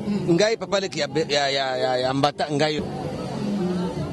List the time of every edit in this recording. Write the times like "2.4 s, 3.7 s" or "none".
2.8 s